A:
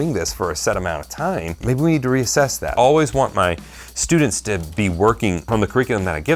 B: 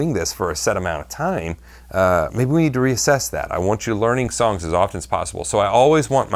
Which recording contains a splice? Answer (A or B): A